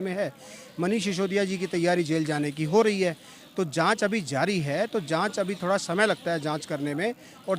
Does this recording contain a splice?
no; 0 cuts

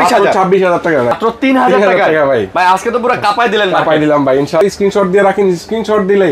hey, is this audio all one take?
no; 2 cuts; at 1.2 s, 4.6 s

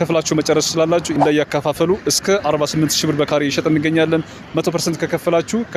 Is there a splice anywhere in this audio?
yes; 1 cut; at 1.1 s

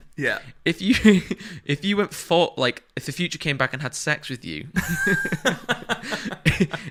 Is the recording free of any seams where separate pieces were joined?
yes; 0 cuts

